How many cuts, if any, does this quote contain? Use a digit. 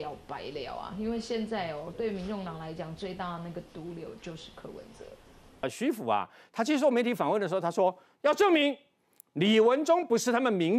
1